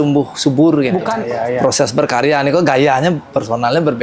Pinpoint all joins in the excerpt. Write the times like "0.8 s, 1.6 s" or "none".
1.1 s